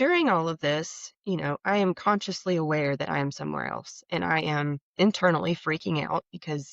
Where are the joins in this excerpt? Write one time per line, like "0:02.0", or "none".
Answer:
0:04.8